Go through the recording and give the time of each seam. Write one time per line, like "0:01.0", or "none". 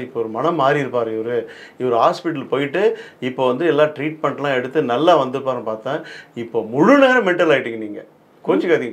none